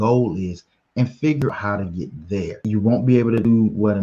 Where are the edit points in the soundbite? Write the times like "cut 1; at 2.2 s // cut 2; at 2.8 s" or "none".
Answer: cut 1; at 2.6 s